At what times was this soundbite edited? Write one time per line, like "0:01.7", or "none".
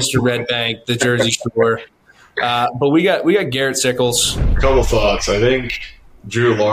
0:04.3